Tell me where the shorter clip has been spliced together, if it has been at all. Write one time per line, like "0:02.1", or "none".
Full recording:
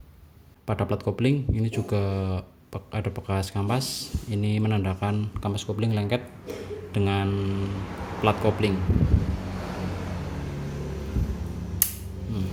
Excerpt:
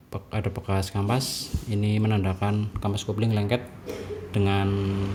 none